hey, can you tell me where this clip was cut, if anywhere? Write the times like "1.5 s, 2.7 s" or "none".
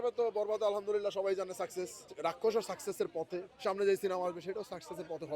2.1 s, 3.5 s